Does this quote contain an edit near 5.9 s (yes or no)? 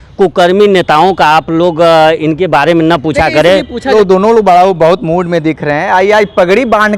no